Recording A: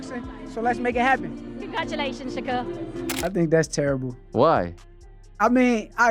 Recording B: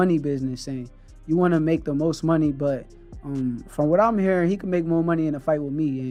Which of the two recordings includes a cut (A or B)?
A